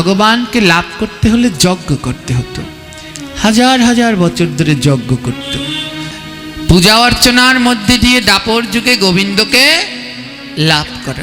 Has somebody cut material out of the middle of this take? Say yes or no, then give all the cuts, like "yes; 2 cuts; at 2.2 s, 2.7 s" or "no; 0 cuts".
yes; 1 cut; at 6.1 s